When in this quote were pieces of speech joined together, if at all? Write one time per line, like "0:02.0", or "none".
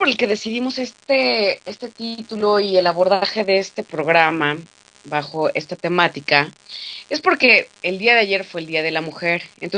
0:01.9